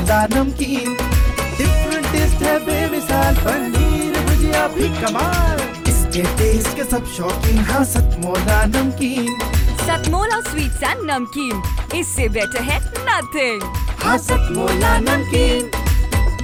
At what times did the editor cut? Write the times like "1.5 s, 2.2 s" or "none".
none